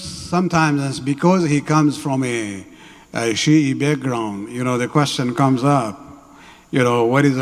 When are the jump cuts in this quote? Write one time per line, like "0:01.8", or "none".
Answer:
none

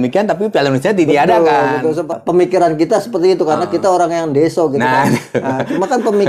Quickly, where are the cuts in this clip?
0:02.1

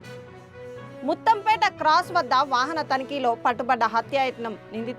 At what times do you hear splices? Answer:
none

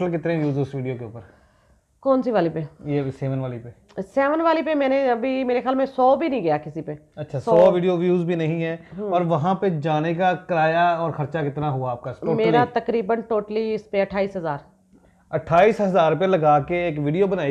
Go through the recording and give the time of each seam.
none

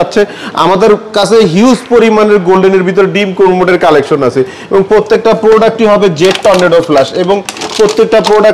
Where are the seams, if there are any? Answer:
none

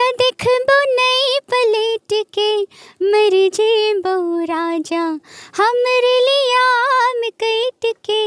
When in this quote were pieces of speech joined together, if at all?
none

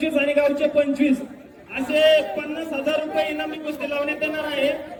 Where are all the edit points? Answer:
none

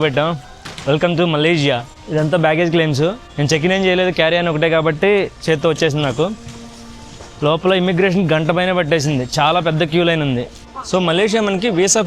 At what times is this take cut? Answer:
none

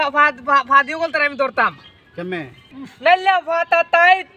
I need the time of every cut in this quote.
0:02.6

